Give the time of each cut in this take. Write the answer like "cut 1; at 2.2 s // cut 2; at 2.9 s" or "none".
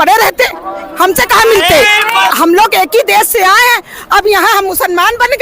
cut 1; at 2.3 s